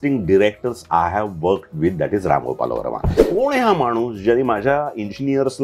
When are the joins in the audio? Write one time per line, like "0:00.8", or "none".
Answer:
0:03.2